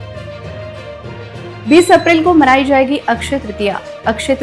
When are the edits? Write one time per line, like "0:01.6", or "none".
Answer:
0:01.5